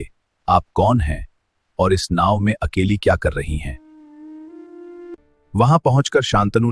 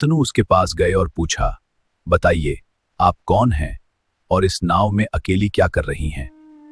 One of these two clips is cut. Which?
first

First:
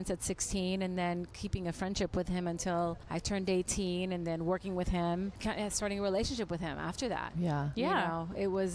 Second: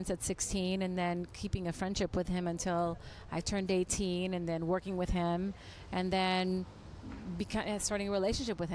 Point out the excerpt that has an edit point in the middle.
first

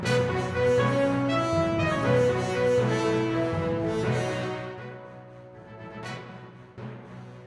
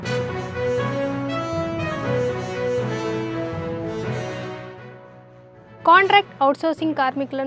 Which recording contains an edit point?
first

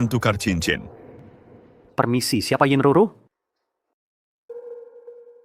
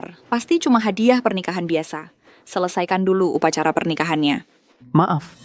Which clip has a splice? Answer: first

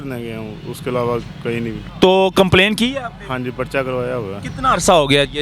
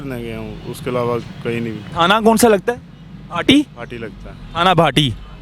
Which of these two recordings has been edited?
first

